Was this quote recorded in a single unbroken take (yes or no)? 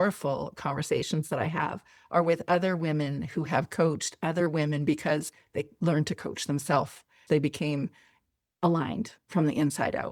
yes